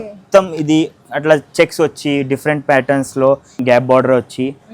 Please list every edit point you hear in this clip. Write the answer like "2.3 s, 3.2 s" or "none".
3.5 s